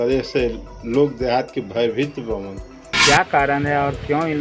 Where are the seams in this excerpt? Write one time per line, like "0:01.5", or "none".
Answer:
0:03.0